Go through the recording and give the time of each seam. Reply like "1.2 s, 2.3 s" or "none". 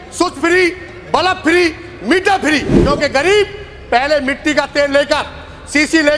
2.7 s